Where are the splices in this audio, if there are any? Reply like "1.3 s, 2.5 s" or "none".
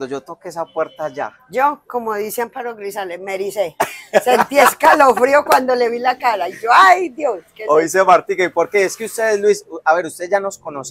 none